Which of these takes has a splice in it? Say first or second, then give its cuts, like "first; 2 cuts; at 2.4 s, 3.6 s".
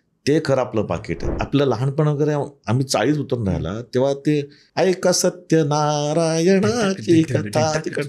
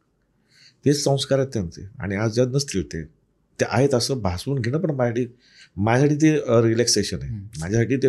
first; 2 cuts; at 1.4 s, 4.6 s